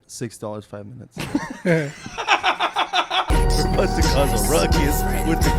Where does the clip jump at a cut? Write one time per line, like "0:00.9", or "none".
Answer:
0:03.3